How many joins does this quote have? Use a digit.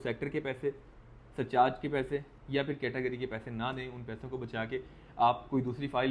0